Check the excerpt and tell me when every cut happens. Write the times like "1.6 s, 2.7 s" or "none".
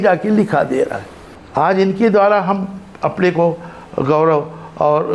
1.4 s